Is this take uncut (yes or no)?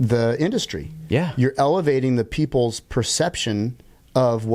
yes